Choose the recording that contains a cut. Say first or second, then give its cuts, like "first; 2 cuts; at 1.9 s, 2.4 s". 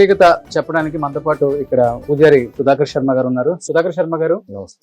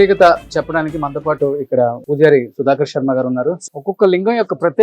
second; 1 cut; at 3.6 s